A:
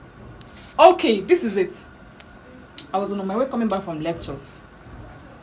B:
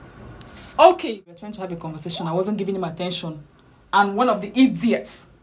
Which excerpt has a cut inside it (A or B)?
B